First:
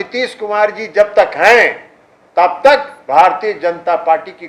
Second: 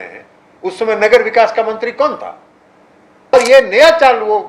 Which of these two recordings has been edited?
second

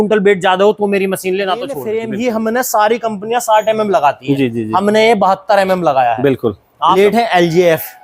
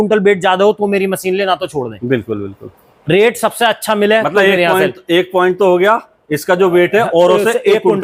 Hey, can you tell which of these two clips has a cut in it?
first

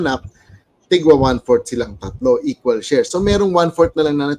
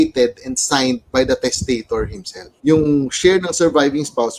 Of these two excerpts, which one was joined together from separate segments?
second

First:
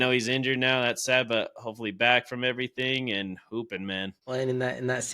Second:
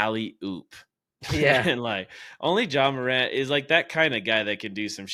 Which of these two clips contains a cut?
first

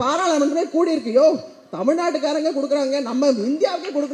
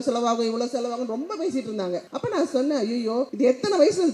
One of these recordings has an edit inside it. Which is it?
second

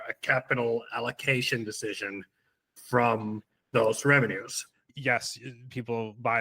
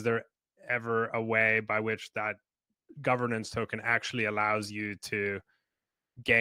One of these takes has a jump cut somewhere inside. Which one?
first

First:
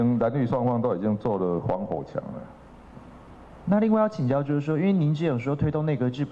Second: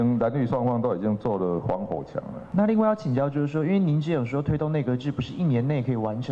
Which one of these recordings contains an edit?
second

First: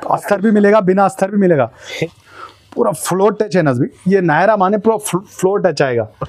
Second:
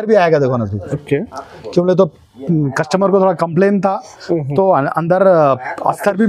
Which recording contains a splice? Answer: first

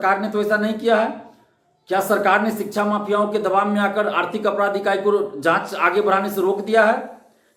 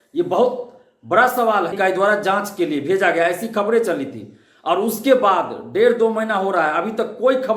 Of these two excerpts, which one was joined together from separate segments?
second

